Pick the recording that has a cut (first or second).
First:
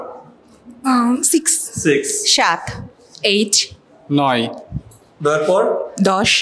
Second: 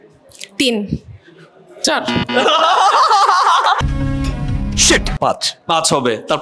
second